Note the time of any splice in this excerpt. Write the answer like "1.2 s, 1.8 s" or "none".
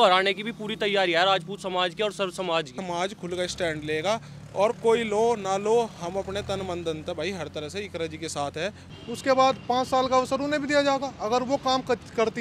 2.8 s, 8.8 s